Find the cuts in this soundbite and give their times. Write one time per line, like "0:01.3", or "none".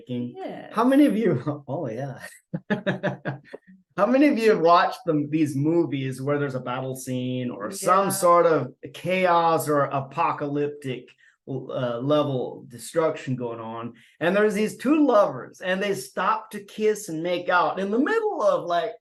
none